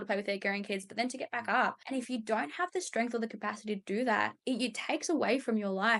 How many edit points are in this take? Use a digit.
2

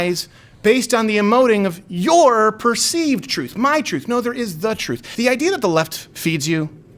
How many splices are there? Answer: 1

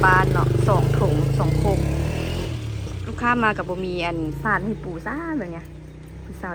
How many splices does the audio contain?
0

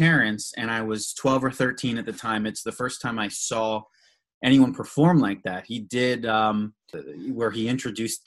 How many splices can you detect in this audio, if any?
1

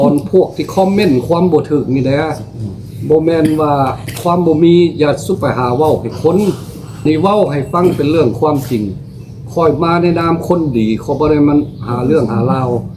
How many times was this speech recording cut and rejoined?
1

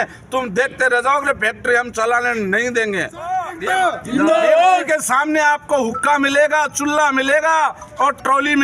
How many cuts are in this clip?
1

